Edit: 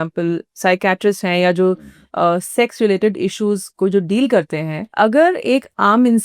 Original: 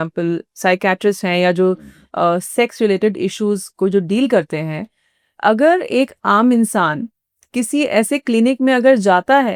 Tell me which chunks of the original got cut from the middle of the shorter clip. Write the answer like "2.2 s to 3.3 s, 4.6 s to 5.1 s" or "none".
4.8 s to 5.2 s